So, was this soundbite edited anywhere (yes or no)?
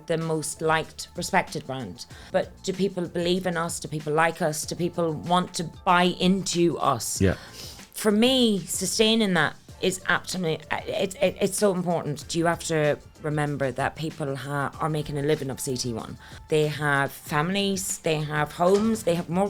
yes